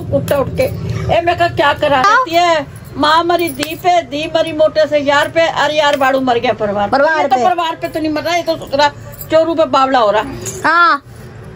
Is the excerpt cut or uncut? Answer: cut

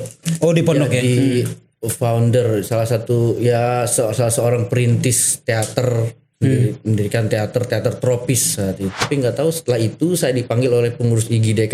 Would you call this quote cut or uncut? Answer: cut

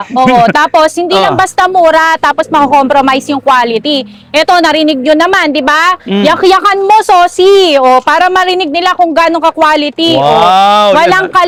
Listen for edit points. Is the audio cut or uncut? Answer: uncut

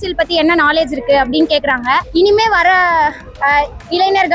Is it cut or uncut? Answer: cut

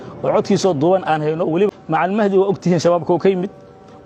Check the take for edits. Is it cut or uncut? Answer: cut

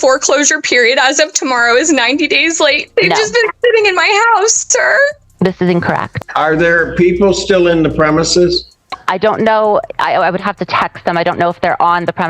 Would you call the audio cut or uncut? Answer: cut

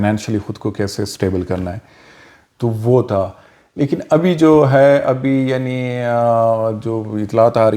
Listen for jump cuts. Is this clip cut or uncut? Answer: uncut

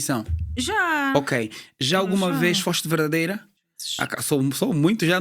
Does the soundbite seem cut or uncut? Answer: uncut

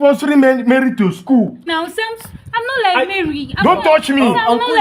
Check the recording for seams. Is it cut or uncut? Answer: cut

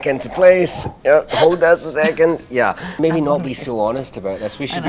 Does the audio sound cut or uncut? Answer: cut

